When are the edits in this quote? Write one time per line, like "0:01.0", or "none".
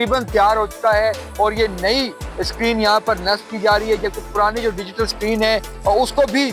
none